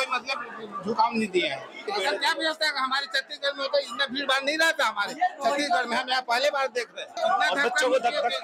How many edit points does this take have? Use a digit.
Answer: 2